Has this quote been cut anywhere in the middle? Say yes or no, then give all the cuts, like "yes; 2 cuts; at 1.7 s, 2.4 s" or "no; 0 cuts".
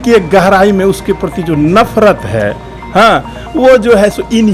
no; 0 cuts